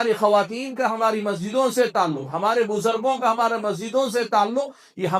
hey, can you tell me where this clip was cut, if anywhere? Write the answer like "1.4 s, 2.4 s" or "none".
none